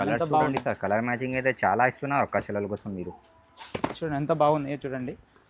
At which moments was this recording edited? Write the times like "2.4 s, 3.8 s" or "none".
none